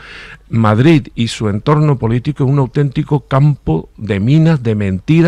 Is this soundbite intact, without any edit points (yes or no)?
yes